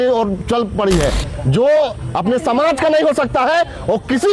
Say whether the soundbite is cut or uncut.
cut